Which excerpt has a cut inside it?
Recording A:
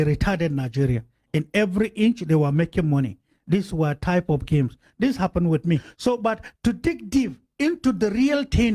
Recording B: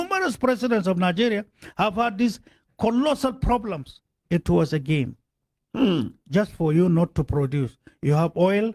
A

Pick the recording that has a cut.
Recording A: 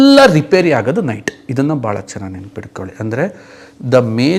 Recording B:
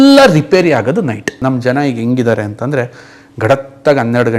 B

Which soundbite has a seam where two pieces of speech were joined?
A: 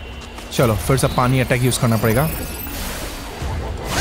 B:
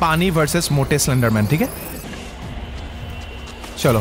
B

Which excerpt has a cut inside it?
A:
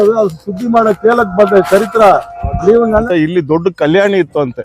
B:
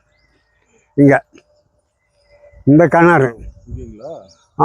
A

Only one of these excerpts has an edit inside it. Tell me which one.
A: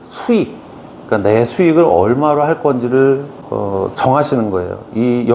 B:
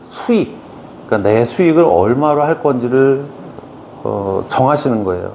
A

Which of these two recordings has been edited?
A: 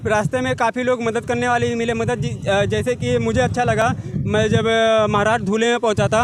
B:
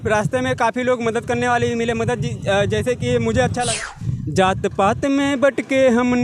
B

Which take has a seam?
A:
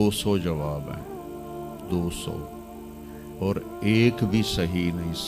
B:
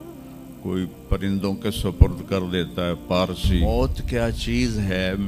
B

